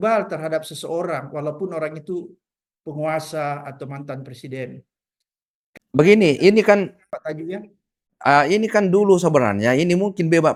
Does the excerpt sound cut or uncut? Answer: uncut